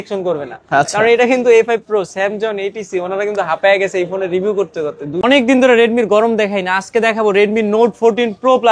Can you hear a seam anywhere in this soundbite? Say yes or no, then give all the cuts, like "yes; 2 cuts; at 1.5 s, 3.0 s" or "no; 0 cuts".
yes; 1 cut; at 5.2 s